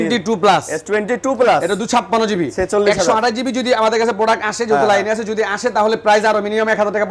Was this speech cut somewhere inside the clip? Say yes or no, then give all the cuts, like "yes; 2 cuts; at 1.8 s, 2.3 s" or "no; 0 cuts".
no; 0 cuts